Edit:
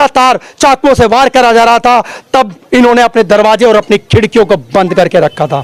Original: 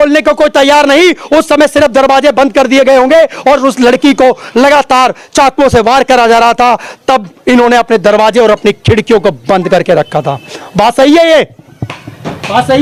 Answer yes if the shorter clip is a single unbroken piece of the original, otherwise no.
yes